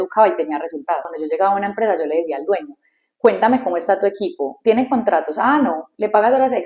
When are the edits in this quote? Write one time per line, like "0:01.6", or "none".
0:01.1